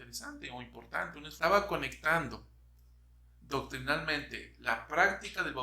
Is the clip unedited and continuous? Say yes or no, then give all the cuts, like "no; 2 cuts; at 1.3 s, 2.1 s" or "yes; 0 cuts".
no; 1 cut; at 1.3 s